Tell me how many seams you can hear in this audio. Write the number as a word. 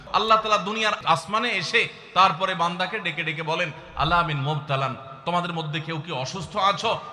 one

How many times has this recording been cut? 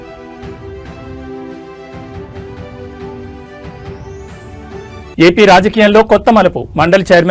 one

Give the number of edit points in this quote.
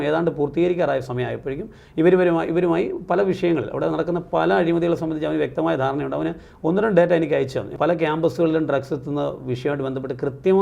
one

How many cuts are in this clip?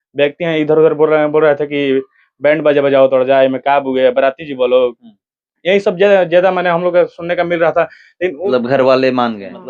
one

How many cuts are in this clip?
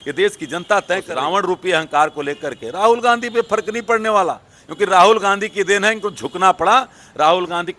one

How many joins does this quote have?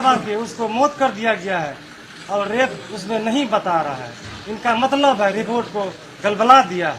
zero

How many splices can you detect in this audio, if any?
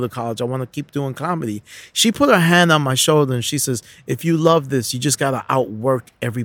zero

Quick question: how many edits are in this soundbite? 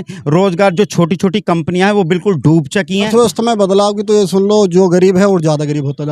one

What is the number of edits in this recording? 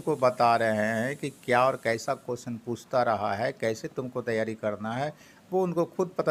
zero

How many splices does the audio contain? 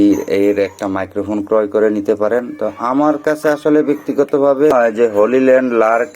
one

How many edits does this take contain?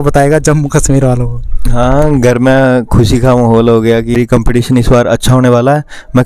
one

